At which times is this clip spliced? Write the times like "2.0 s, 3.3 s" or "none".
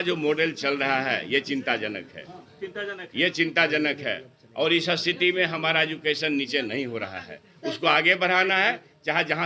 none

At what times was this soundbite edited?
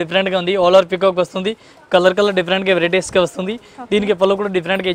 none

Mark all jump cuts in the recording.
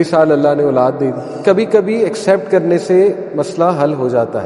1.4 s

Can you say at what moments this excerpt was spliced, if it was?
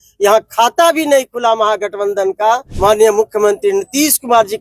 2.7 s

